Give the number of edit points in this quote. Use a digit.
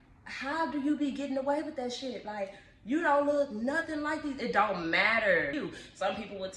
1